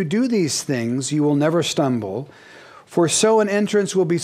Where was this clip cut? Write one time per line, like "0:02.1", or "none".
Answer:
0:01.2